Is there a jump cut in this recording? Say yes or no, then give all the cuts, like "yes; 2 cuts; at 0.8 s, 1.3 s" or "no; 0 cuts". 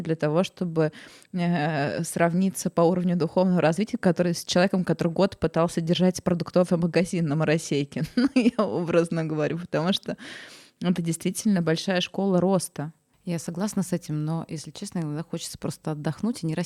no; 0 cuts